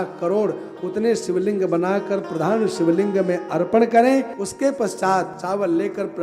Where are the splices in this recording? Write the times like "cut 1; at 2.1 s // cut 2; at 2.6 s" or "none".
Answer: cut 1; at 4.4 s // cut 2; at 5.4 s